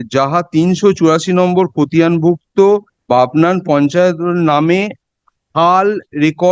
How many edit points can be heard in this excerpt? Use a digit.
1